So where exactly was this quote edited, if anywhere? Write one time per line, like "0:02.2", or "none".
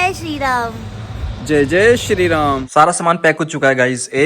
0:02.6